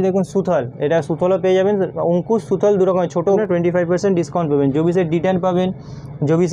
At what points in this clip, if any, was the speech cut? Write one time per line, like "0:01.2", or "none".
0:03.4